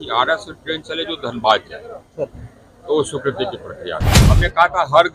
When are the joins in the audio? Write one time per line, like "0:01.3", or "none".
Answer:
0:04.2